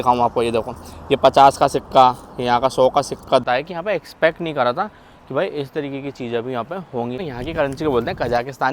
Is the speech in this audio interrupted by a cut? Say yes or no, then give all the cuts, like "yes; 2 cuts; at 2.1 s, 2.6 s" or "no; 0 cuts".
yes; 2 cuts; at 3.4 s, 7.3 s